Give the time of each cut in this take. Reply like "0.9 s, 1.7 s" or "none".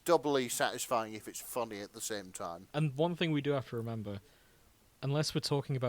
2.6 s